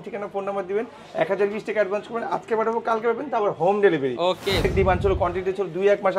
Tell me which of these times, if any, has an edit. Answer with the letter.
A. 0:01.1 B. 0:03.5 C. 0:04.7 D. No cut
C